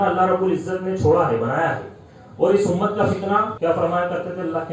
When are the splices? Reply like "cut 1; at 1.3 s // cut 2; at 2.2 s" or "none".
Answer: cut 1; at 3.5 s